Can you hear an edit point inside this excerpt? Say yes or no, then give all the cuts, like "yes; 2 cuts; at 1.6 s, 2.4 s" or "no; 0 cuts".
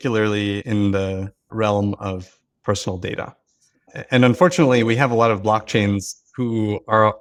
no; 0 cuts